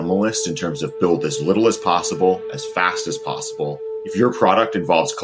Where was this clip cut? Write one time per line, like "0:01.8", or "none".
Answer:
0:03.9